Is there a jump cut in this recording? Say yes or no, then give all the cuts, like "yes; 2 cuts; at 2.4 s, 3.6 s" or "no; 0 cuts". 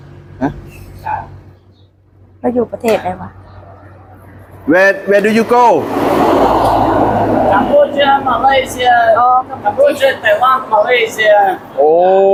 no; 0 cuts